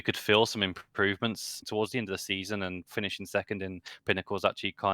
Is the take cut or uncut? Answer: cut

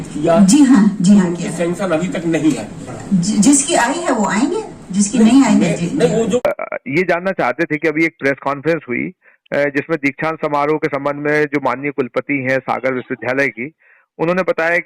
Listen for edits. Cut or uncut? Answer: cut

